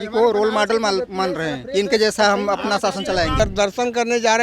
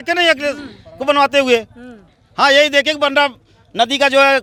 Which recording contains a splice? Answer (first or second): first